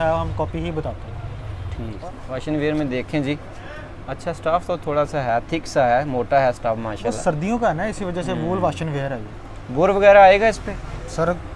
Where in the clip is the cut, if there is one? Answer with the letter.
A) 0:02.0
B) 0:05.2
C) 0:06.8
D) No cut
A